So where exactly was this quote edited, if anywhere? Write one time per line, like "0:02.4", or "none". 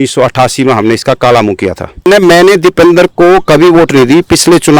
0:02.1